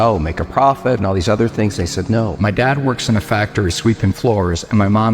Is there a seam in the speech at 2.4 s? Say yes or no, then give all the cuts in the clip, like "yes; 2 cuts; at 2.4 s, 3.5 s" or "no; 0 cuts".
yes; 1 cut; at 2.4 s